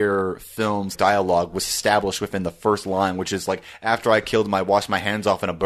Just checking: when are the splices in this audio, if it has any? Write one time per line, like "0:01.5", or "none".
0:00.9